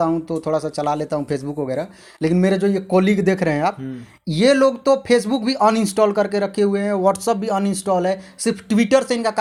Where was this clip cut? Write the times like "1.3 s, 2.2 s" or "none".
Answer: none